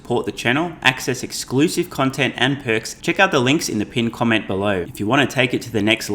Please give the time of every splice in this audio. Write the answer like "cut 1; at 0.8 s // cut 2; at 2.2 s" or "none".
cut 1; at 2.9 s // cut 2; at 4.9 s